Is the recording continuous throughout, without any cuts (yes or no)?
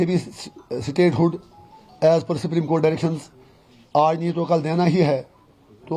yes